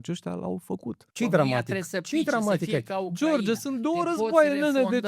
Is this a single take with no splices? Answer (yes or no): no